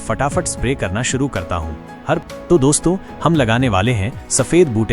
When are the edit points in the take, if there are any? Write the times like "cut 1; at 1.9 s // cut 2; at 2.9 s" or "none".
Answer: cut 1; at 2.2 s